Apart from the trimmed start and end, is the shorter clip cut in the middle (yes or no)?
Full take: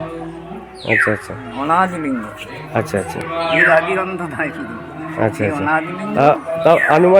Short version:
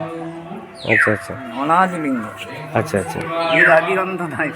no